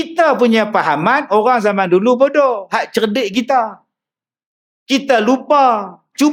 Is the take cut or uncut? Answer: uncut